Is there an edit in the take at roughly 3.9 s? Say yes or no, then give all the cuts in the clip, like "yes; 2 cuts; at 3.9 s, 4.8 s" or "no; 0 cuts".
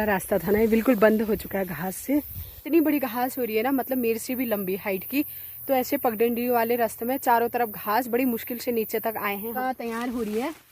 no; 2 cuts; at 2.6 s, 9.5 s